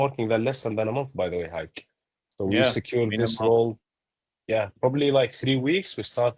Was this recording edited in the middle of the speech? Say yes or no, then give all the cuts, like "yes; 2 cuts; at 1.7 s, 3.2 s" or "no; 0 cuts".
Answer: no; 0 cuts